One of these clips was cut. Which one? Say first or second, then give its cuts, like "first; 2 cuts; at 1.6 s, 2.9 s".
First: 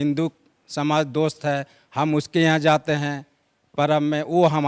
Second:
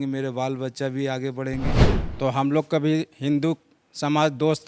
second; 1 cut; at 1.7 s